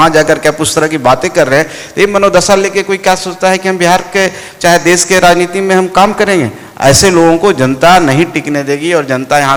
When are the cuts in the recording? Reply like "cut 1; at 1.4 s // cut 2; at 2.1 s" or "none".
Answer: none